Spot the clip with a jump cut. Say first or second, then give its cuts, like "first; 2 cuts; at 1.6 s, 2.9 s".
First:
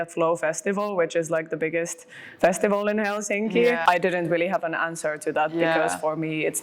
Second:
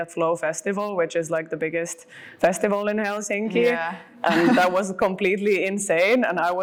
first; 1 cut; at 3.8 s